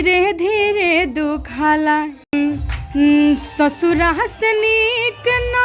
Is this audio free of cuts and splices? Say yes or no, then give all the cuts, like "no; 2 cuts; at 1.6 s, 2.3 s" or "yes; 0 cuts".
no; 1 cut; at 2.3 s